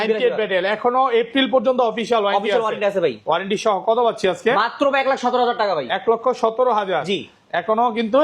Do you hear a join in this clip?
no; 0 cuts

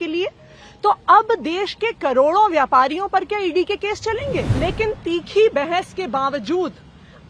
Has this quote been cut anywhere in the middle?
yes; 1 cut; at 4.5 s

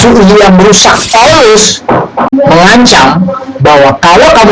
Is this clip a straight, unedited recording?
no; 2 cuts; at 1.1 s, 2.3 s

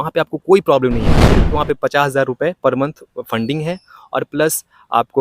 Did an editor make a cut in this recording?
yes; 1 cut; at 1.4 s

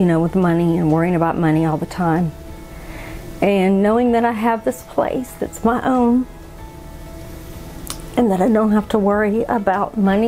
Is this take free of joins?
yes; 0 cuts

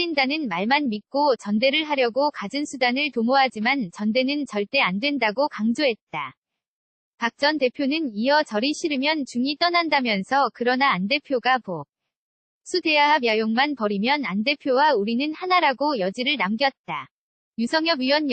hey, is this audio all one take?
yes; 0 cuts

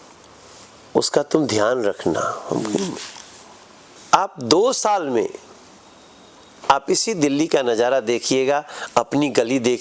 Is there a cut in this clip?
yes; 1 cut; at 3.9 s

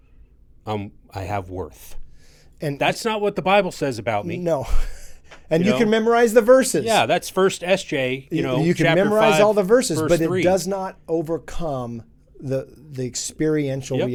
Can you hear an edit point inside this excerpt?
no; 0 cuts

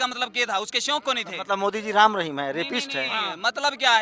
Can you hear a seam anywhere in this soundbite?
no; 0 cuts

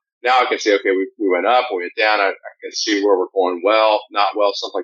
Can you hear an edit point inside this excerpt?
no; 0 cuts

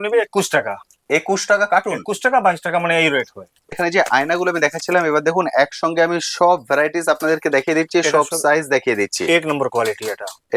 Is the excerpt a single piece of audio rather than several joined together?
no; 1 cut; at 3.7 s

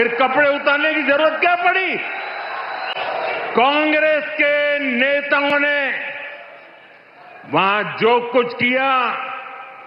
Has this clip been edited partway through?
no; 0 cuts

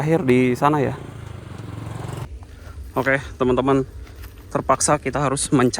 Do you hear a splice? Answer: yes; 1 cut; at 2.2 s

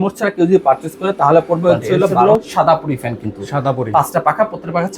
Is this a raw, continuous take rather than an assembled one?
no; 1 cut; at 2.2 s

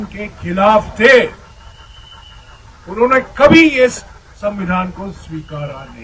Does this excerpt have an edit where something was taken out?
no; 0 cuts

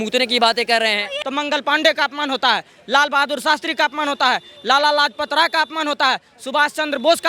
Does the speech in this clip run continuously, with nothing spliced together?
no; 1 cut; at 1.1 s

